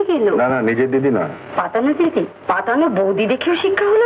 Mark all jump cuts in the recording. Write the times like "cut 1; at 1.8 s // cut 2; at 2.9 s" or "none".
cut 1; at 2.4 s